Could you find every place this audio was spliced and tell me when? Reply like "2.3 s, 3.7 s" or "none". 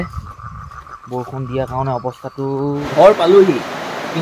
2.8 s